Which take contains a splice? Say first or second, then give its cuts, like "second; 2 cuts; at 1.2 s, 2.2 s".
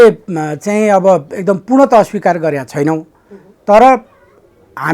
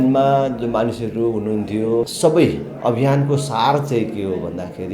second; 1 cut; at 2.1 s